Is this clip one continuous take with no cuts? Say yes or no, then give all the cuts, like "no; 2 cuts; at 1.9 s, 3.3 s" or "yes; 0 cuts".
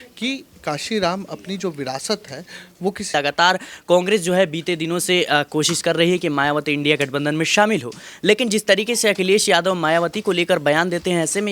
no; 1 cut; at 3.1 s